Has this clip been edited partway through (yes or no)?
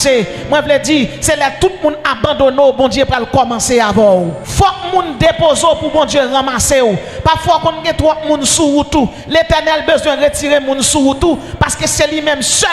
yes